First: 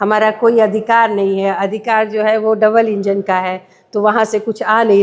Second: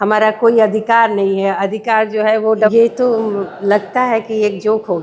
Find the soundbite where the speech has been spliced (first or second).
second